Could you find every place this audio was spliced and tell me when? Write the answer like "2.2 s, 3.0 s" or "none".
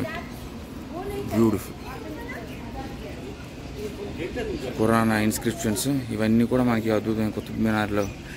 none